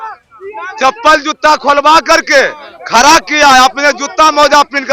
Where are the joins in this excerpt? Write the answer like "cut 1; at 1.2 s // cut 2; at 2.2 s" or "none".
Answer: none